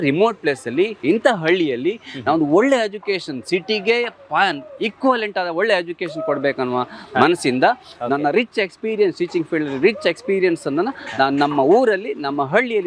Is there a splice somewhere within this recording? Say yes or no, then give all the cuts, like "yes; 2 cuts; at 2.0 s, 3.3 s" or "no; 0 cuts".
no; 0 cuts